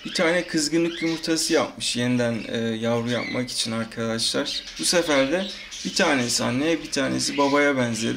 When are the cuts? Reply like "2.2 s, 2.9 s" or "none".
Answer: 4.6 s